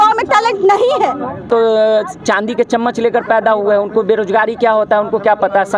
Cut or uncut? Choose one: cut